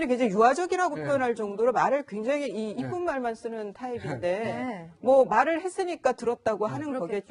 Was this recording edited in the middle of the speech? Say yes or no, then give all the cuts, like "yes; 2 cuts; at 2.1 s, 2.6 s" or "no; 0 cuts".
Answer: yes; 1 cut; at 4.0 s